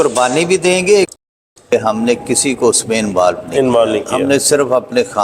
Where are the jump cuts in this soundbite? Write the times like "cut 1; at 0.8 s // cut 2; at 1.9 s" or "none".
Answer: cut 1; at 1.2 s

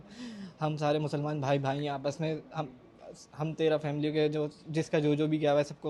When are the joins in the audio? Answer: none

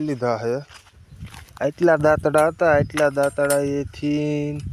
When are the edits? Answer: none

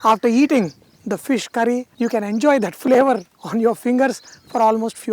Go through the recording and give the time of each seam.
cut 1; at 1.9 s

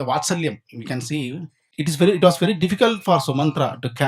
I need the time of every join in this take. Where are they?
cut 1; at 1.7 s

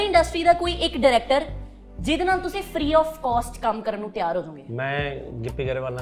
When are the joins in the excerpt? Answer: none

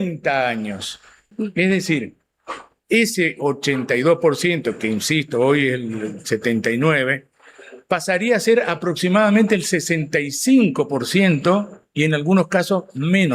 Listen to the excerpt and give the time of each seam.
cut 1; at 1.2 s

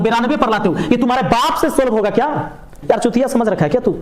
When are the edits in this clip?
cut 1; at 2.8 s

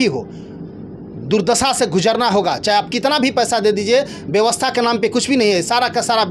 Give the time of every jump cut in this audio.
none

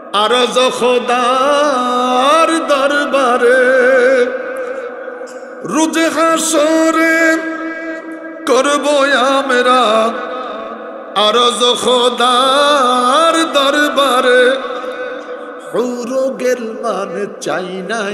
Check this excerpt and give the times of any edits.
none

